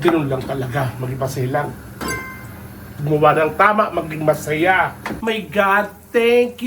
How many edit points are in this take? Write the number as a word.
one